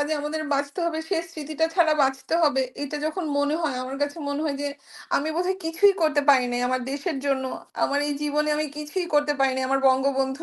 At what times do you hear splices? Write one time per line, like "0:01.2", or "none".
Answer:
none